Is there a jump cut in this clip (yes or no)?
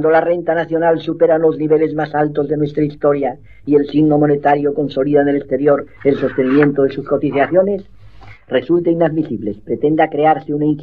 yes